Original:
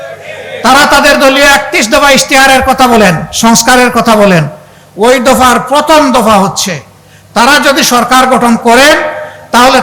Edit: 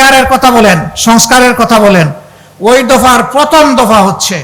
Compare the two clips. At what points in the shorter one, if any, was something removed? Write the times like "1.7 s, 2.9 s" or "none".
none